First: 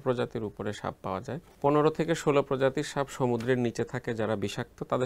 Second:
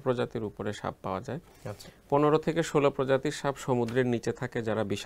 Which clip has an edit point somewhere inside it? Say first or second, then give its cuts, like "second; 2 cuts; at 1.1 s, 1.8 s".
first; 1 cut; at 1.4 s